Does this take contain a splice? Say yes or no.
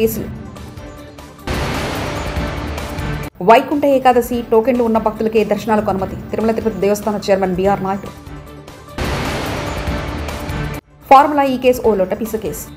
no